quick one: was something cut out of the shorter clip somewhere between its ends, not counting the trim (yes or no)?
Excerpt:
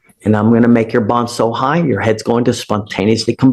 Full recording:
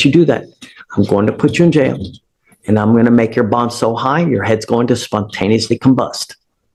no